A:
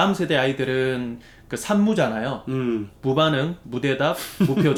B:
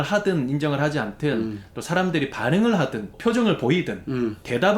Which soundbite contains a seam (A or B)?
B